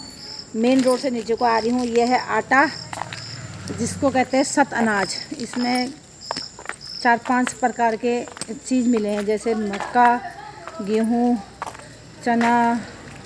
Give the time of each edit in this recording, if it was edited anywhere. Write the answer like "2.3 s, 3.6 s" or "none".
none